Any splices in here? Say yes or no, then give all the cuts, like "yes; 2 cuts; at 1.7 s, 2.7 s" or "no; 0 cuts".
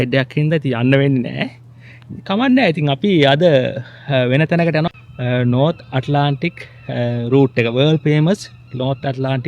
yes; 1 cut; at 4.9 s